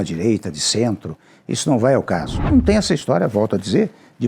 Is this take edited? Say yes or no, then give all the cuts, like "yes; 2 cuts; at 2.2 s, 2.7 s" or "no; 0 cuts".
yes; 1 cut; at 2.4 s